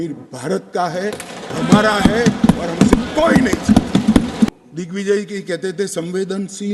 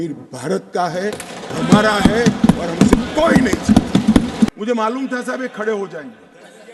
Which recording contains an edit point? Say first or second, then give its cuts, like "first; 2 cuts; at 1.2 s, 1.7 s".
second; 1 cut; at 4.6 s